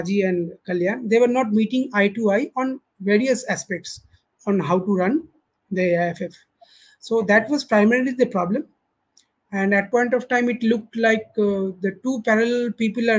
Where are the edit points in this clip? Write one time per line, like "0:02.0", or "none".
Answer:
none